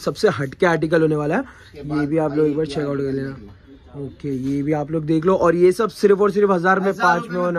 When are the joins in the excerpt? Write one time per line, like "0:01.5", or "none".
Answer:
none